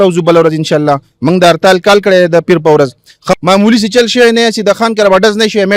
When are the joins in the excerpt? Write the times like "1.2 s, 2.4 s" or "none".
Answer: 3.3 s